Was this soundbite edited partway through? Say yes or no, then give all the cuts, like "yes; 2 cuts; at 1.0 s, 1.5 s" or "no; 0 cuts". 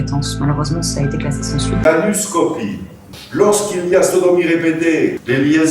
yes; 1 cut; at 1.9 s